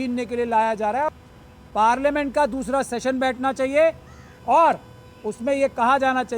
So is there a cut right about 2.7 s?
no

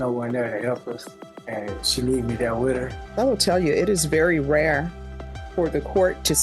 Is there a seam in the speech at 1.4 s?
no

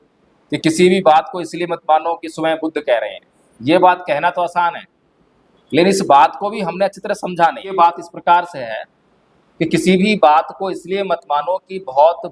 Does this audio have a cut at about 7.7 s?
yes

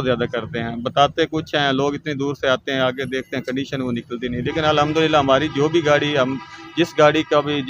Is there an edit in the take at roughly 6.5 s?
no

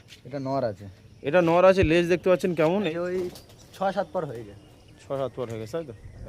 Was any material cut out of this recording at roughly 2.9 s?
yes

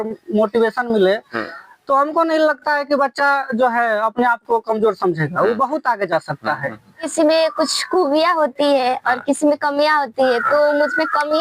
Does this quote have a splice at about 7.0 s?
yes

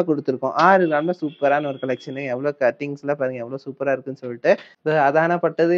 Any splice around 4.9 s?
yes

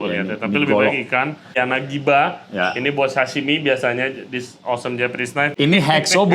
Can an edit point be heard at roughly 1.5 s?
yes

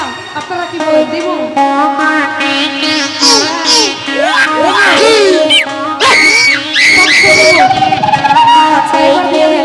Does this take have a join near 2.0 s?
no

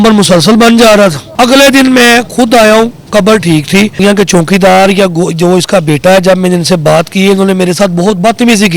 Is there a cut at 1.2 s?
yes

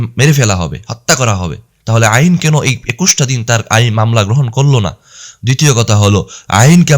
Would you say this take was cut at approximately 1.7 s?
yes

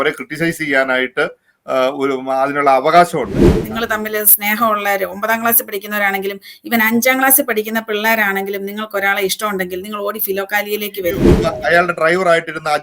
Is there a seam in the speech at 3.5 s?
yes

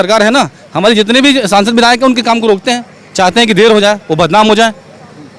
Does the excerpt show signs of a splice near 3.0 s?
no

